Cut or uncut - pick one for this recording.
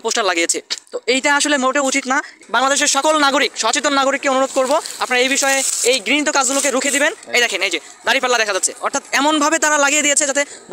uncut